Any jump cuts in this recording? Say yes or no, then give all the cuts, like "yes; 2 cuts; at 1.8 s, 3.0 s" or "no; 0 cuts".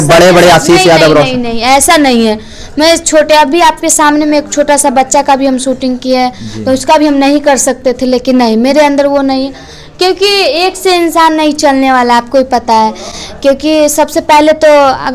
no; 0 cuts